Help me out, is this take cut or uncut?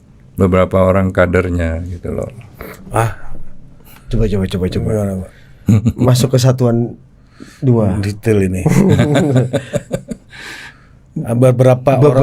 uncut